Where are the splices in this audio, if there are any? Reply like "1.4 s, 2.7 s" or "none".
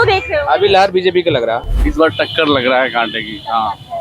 1.7 s